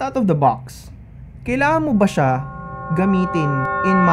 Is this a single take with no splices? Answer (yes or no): yes